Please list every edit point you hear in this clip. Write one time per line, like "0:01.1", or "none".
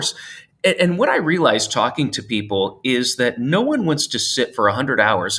none